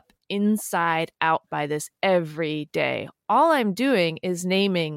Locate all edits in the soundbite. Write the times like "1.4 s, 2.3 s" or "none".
none

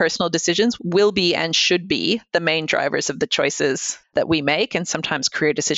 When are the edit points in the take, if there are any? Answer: 3.9 s

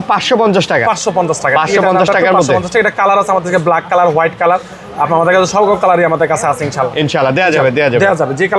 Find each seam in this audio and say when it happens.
none

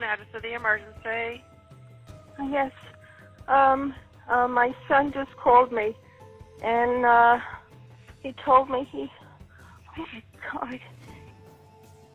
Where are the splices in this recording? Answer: none

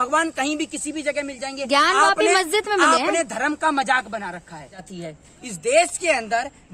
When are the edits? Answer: 4.9 s

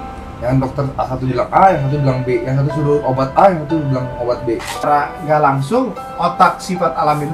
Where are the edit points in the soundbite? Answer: 4.9 s

